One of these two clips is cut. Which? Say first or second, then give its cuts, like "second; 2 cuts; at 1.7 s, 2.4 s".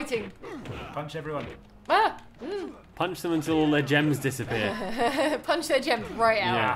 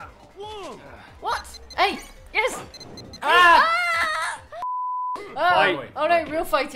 second; 1 cut; at 4.6 s